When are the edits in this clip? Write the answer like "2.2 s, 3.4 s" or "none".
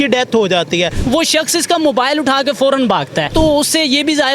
1.0 s, 3.3 s